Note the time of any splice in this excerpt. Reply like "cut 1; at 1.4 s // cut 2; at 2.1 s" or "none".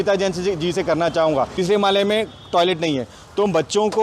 cut 1; at 1.5 s